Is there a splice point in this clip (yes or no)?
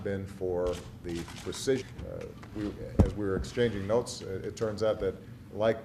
no